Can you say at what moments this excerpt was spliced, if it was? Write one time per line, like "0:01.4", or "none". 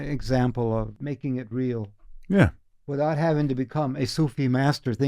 0:01.0